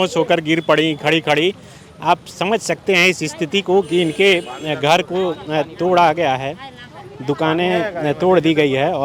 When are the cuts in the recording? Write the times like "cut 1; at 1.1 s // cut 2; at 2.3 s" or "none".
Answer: none

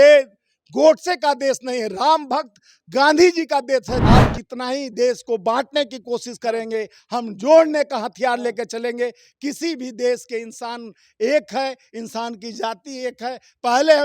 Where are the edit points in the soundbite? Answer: cut 1; at 4.0 s

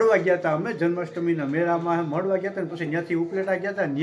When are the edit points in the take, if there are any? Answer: none

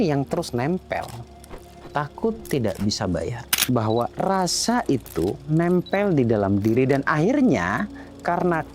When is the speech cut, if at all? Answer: cut 1; at 3.6 s

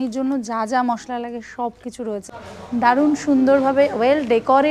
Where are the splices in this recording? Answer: cut 1; at 2.2 s

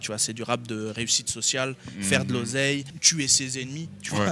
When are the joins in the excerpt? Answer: cut 1; at 3.0 s

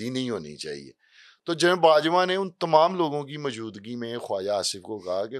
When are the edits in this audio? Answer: none

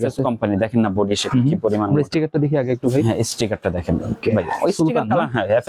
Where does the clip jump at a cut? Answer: none

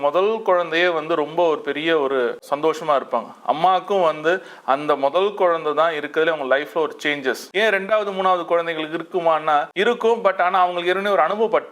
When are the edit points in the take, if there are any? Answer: cut 1; at 2.5 s // cut 2; at 7.4 s // cut 3; at 9.7 s

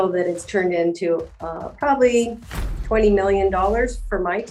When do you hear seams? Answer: none

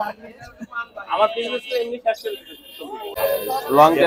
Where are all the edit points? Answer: cut 1; at 3.1 s

